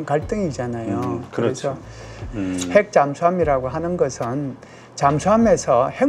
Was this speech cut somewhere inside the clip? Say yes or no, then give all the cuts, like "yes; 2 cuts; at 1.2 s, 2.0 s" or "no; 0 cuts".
yes; 1 cut; at 2.2 s